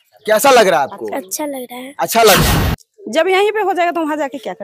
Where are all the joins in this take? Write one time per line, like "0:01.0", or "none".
0:02.4